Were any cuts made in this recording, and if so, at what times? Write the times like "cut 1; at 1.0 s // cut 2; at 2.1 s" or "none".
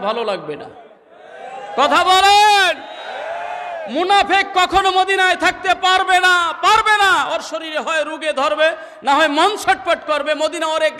none